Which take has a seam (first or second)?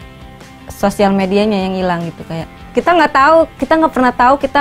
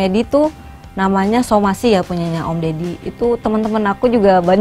first